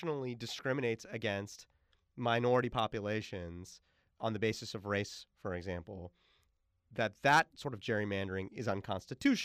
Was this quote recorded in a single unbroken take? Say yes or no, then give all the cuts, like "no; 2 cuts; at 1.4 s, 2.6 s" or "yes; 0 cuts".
no; 1 cut; at 4.1 s